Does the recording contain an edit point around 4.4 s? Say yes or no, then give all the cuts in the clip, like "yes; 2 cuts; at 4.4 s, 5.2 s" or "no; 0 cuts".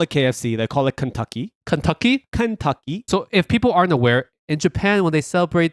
yes; 2 cuts; at 3.0 s, 4.4 s